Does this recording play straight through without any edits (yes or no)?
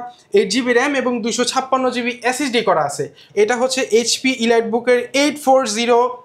no